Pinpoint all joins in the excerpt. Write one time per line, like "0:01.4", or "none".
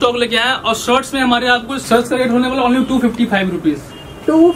0:01.8